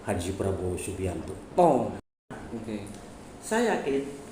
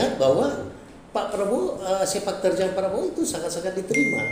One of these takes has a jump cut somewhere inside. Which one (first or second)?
first